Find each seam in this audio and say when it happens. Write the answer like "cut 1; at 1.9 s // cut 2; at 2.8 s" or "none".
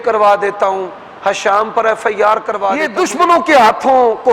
cut 1; at 2.9 s